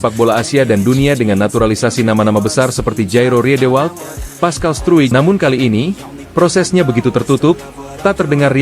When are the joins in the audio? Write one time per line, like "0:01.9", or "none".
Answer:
0:05.1